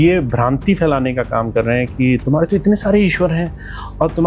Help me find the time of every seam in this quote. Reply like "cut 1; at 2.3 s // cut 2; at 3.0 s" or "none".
none